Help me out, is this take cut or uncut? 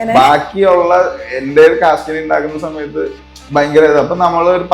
uncut